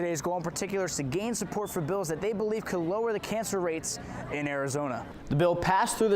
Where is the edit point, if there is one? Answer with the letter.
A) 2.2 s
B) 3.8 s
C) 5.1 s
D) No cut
C